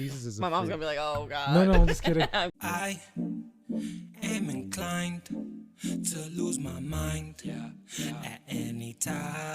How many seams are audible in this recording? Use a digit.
1